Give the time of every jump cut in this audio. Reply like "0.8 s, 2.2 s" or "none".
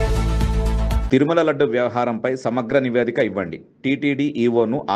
1.0 s